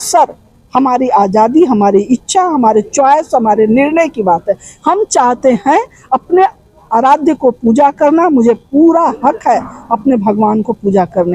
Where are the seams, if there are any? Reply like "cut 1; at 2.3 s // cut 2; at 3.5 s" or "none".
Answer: none